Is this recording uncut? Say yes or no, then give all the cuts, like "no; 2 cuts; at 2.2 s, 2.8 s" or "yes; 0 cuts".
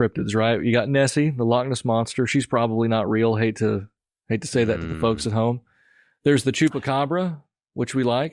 yes; 0 cuts